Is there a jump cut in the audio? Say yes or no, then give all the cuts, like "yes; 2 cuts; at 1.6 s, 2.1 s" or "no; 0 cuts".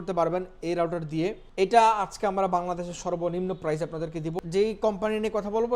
yes; 2 cuts; at 1.4 s, 4.4 s